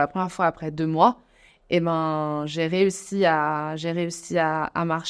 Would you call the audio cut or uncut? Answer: uncut